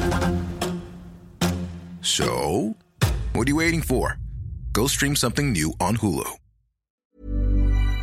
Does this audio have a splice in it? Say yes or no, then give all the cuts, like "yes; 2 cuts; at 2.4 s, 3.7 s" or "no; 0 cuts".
yes; 1 cut; at 6.9 s